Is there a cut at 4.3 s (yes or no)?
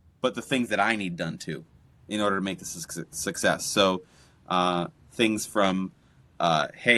no